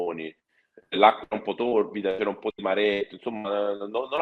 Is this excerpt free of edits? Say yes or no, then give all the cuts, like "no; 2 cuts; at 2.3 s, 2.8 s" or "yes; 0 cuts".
yes; 0 cuts